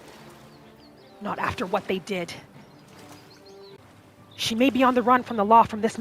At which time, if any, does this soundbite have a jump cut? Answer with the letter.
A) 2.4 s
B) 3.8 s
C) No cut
B